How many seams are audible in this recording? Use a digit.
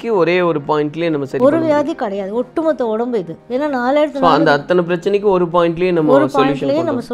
1